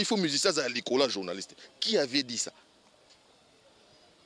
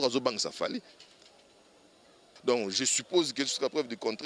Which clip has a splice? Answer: second; 1 cut; at 2.3 s

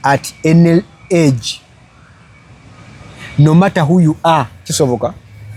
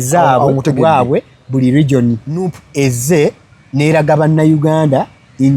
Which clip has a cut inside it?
second; 1 cut; at 2.6 s

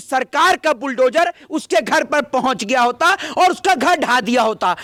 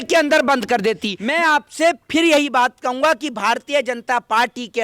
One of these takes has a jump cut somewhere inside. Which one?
second; 1 cut; at 1.1 s

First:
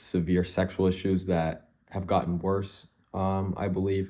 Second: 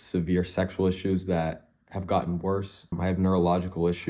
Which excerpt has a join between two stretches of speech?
second; 1 cut; at 2.9 s

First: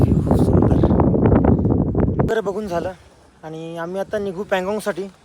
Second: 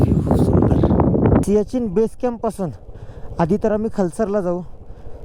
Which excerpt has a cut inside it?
second; 1 cut; at 1.4 s

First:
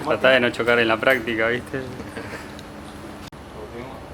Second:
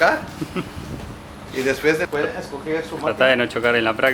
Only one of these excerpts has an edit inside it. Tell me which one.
second; 1 cut; at 2.1 s

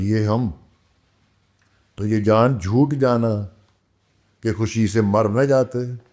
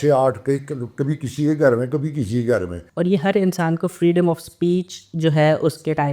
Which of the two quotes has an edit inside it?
second; 1 cut; at 2.8 s

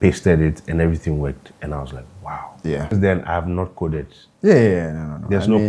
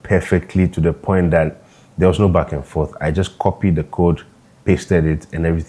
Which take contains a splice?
first; 1 cut; at 2.9 s

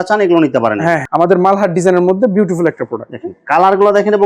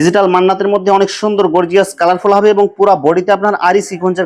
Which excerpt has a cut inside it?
first; 1 cut; at 1.0 s

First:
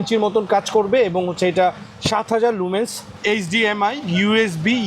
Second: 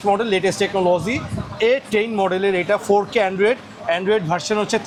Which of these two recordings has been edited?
first; 1 cut; at 3.0 s

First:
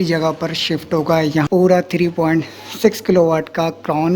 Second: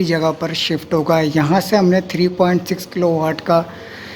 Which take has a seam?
first; 1 cut; at 1.5 s

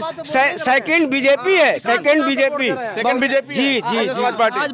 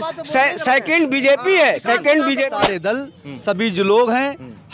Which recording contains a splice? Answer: second; 1 cut; at 2.6 s

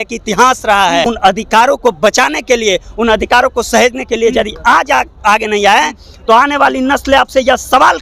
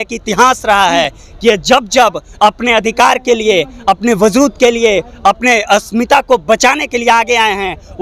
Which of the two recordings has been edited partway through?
first; 1 cut; at 1.0 s

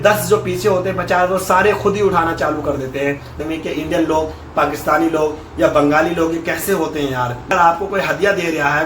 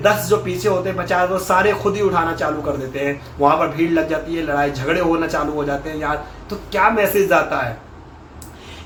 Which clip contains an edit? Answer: first; 2 cuts; at 3.4 s, 7.5 s

